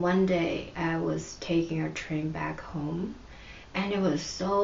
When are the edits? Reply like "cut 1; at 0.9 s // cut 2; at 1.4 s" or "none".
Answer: none

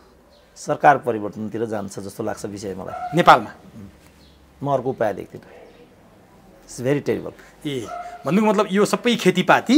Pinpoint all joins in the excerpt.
none

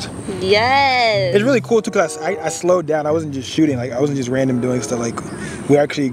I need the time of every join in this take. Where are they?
none

